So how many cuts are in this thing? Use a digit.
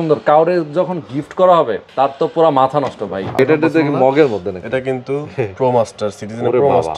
2